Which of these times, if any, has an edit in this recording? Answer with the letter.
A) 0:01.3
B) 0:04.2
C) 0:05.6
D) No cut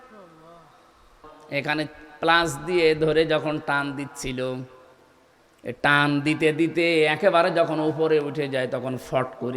A